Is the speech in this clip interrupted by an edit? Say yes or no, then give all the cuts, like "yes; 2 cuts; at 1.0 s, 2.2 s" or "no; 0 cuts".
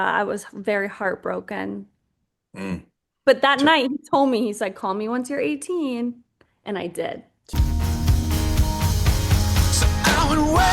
yes; 1 cut; at 7.6 s